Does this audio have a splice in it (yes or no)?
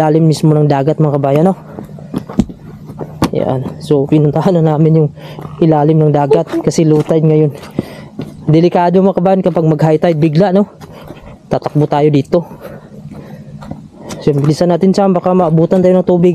no